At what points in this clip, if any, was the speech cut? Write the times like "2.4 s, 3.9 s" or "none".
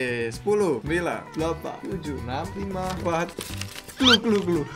none